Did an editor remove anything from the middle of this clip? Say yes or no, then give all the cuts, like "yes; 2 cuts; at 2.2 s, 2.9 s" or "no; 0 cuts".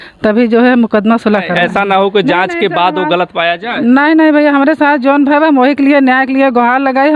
yes; 1 cut; at 1.5 s